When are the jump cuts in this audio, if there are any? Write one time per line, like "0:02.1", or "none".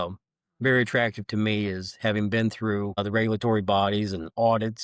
0:03.0